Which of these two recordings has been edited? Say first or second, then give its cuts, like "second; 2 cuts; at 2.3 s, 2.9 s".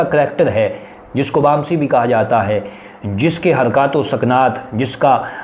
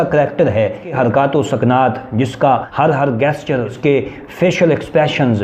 second; 3 cuts; at 0.9 s, 2.7 s, 3.7 s